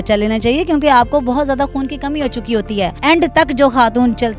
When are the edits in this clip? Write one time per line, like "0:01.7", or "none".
0:02.9